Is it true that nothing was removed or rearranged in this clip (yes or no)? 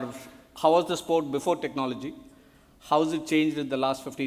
yes